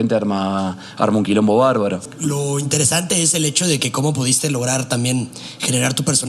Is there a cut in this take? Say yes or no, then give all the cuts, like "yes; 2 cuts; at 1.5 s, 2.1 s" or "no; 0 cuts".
yes; 1 cut; at 2.1 s